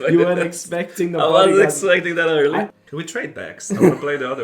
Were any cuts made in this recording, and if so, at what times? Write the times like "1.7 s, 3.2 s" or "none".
2.7 s